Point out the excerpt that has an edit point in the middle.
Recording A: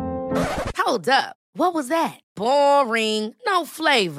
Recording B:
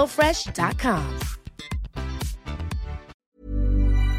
B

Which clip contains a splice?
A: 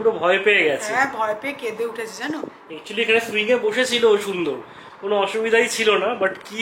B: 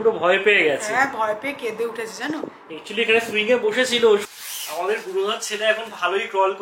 B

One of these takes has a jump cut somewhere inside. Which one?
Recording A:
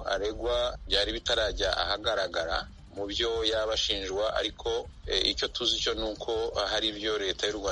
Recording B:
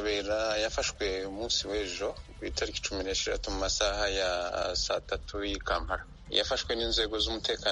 A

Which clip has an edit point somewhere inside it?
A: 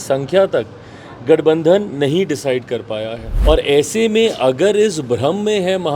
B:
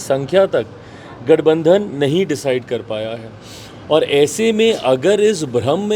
A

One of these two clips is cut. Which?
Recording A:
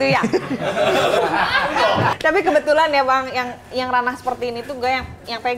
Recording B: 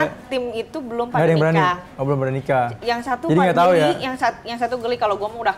A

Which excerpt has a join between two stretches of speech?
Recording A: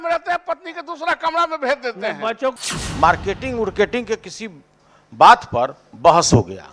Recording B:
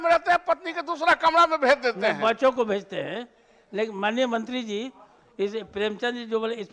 A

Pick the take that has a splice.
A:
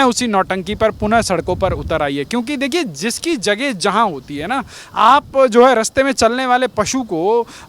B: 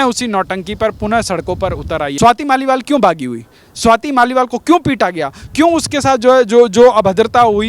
B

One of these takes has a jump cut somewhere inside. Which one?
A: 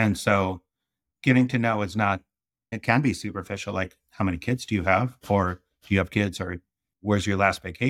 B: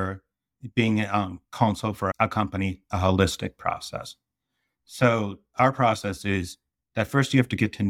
B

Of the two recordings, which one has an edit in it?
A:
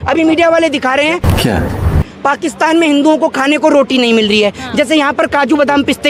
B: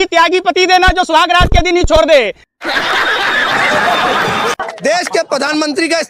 B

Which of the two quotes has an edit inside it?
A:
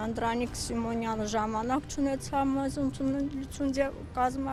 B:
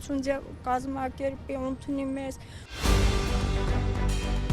B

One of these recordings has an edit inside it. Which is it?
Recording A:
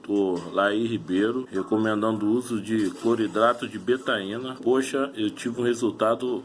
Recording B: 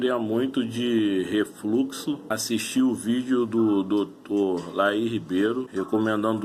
A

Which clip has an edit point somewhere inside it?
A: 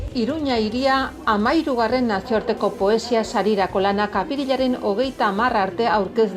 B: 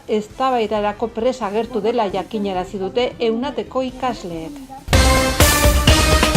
B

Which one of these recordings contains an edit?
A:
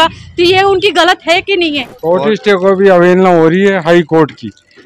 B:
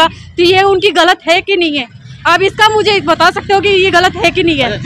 A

